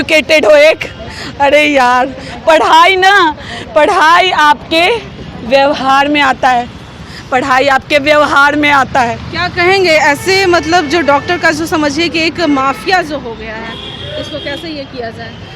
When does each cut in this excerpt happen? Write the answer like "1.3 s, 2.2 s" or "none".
none